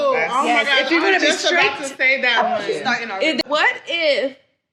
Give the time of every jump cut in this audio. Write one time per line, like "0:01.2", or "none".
0:03.4

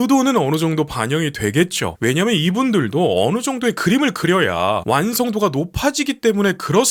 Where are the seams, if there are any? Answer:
none

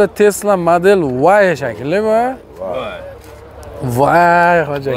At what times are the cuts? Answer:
none

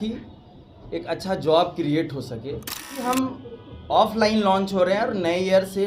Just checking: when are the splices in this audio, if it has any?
0:03.0

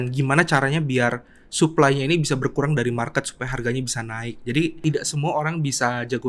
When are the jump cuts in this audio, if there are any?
0:04.8

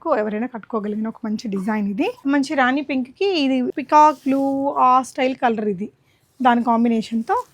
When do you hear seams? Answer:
0:02.2
0:03.7

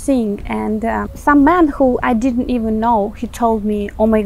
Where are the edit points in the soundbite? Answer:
0:01.1

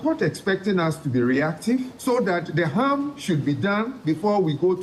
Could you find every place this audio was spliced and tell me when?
0:01.9

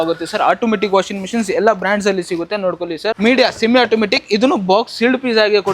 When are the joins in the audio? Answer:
0:03.2

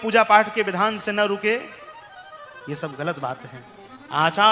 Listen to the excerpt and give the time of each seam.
none

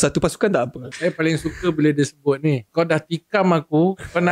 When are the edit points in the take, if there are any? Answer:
0:00.9
0:02.6

